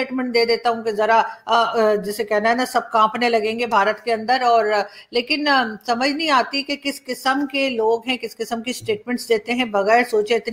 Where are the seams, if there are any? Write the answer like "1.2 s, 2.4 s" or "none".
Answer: none